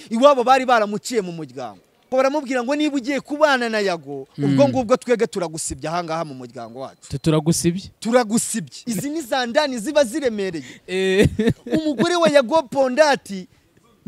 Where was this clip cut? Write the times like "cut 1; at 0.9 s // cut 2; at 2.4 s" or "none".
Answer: cut 1; at 2.1 s // cut 2; at 8.8 s